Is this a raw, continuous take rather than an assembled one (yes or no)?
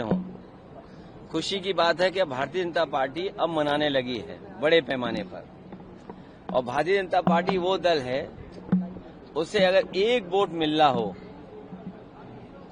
yes